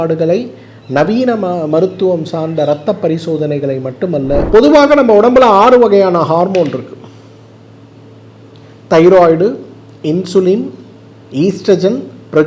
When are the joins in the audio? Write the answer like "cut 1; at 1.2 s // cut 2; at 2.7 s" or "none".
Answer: cut 1; at 4.5 s